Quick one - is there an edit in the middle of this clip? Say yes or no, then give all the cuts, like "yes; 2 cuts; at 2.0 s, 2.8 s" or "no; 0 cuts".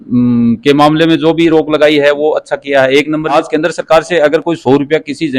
yes; 1 cut; at 3.4 s